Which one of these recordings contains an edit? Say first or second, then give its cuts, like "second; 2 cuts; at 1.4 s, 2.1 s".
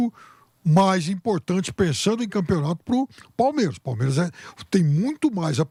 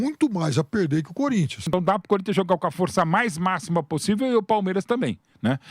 second; 1 cut; at 1.6 s